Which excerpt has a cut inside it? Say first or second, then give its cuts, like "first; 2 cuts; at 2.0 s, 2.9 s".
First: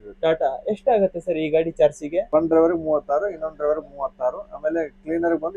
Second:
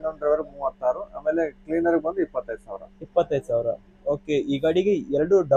first; 1 cut; at 2.3 s